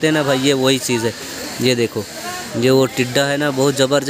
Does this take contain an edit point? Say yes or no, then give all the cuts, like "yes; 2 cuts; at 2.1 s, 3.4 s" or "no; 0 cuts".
no; 0 cuts